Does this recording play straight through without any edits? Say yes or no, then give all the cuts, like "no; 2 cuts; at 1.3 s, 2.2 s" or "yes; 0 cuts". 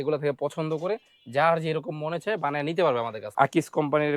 no; 1 cut; at 3.2 s